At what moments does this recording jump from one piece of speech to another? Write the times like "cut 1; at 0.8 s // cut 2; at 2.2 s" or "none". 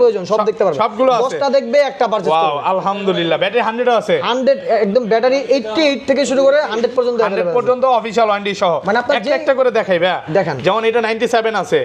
none